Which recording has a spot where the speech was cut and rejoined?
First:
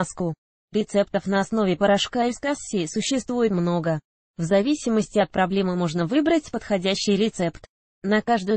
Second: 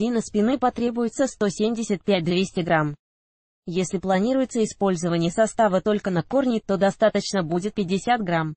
first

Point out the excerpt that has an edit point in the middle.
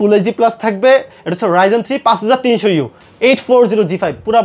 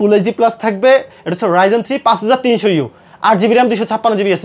first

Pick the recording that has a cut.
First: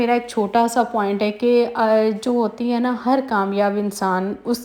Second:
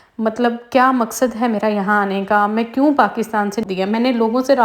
second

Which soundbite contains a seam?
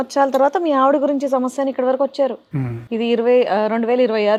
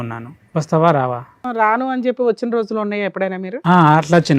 second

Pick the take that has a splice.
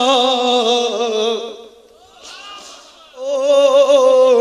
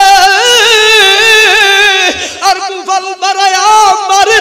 first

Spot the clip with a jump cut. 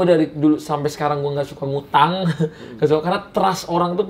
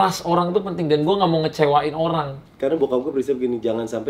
second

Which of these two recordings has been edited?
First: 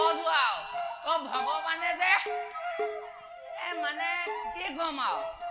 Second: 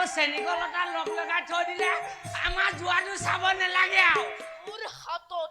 second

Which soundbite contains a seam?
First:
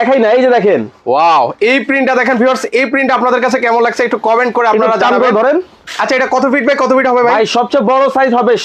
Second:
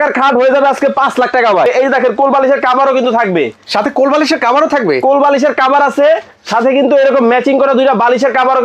second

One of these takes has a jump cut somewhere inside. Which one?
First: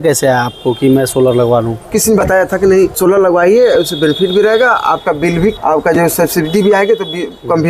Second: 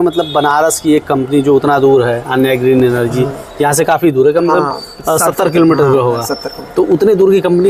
first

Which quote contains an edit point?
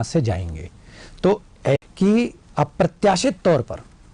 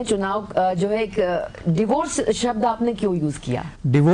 first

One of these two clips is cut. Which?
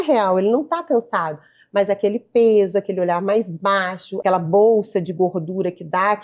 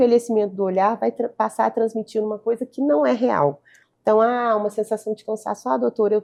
first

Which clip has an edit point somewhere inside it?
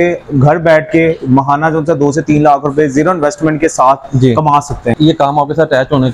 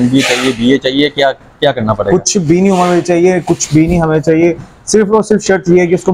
first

